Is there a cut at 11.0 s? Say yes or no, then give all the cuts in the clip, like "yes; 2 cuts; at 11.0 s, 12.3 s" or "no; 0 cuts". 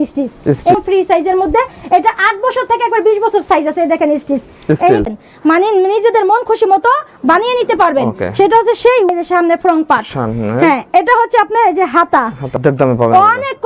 no; 4 cuts; at 0.8 s, 5.1 s, 9.1 s, 12.6 s